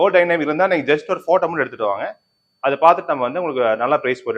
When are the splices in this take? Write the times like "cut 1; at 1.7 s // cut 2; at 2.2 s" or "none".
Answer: none